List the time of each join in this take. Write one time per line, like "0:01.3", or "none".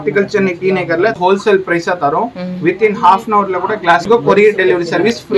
0:01.3
0:04.1